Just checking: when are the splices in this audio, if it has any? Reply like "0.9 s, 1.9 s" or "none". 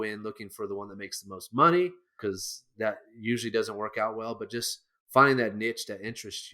2.1 s